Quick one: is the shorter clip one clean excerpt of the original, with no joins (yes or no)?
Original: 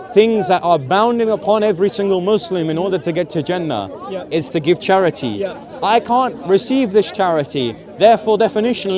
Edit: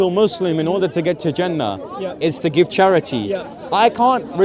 yes